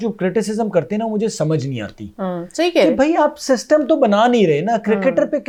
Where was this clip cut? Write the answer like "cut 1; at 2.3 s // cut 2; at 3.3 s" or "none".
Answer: none